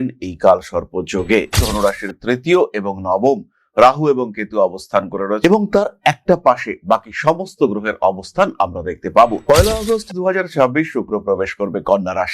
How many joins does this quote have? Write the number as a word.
one